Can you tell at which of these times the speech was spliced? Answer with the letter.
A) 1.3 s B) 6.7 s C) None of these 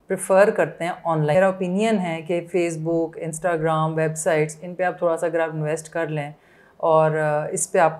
A